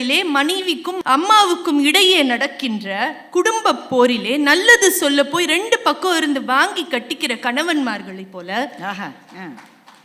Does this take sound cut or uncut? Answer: cut